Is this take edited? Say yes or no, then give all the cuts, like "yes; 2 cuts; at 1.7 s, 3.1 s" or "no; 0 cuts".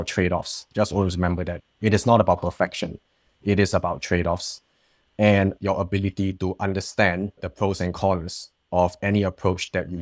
yes; 2 cuts; at 5.6 s, 7.4 s